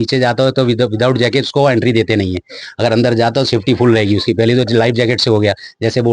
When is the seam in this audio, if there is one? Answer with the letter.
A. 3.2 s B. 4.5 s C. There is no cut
C